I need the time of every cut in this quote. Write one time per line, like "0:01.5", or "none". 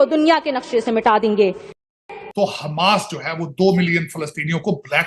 0:02.2